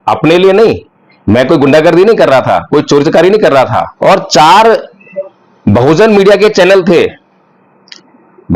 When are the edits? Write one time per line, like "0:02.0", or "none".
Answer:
0:03.9